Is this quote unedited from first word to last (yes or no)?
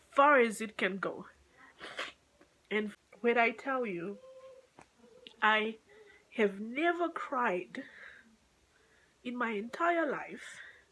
no